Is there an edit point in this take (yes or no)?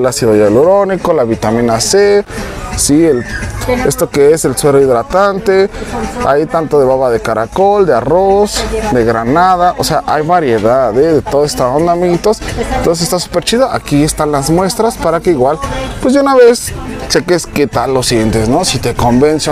no